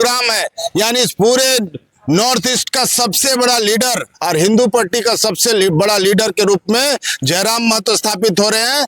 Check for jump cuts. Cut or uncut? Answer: uncut